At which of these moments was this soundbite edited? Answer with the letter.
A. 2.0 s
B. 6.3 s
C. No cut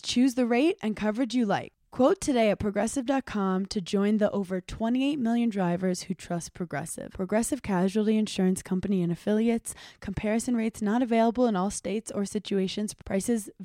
C